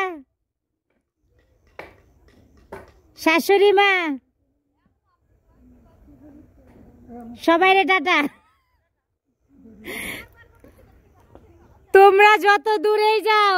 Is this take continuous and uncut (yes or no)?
yes